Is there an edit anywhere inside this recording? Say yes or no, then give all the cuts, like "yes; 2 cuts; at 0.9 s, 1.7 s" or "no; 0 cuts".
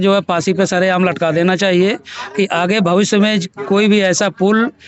no; 0 cuts